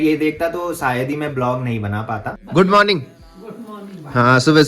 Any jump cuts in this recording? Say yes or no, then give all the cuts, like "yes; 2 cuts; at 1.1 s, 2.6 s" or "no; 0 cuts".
yes; 1 cut; at 2.3 s